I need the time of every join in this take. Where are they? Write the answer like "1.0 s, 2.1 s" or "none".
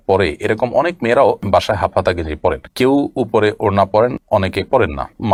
none